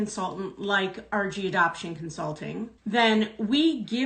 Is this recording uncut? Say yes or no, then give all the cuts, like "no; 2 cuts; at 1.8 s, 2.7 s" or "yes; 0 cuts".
no; 1 cut; at 2.7 s